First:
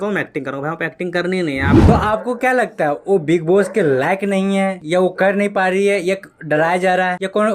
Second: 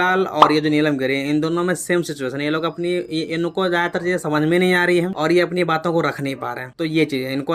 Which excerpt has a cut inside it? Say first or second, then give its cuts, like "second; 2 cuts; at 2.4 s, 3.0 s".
first; 1 cut; at 1.8 s